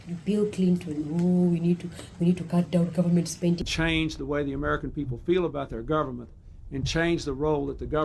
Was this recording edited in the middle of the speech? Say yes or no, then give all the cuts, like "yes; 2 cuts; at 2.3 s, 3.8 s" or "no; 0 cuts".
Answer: no; 0 cuts